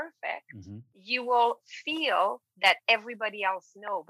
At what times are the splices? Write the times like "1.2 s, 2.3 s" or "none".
0.9 s